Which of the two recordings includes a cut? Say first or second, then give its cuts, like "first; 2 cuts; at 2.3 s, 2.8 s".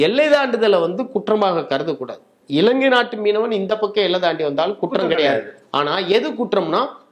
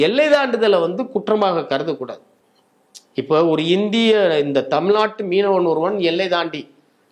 first; 1 cut; at 2.4 s